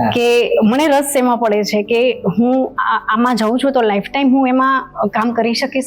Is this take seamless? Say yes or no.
yes